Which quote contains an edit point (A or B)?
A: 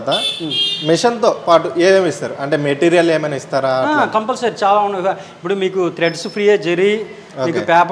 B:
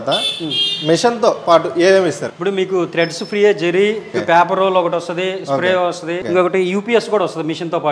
B